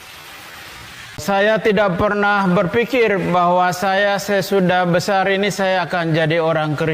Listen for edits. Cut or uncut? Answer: uncut